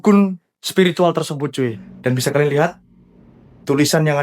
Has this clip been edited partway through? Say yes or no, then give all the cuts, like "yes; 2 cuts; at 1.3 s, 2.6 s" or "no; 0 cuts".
yes; 1 cut; at 1.8 s